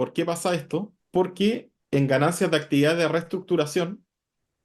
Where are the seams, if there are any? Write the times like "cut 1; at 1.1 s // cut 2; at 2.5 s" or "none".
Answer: cut 1; at 1.0 s // cut 2; at 1.7 s